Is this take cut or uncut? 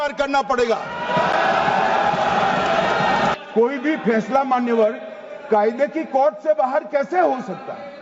cut